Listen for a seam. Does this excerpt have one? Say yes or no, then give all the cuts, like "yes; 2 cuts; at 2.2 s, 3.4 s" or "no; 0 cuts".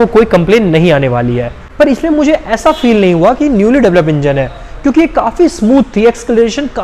yes; 1 cut; at 1.5 s